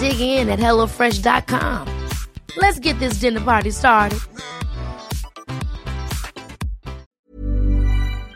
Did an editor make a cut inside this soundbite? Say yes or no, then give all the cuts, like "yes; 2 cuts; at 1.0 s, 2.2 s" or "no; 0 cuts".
yes; 1 cut; at 7.2 s